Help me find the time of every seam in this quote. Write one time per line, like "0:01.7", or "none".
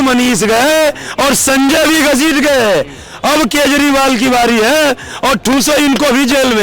none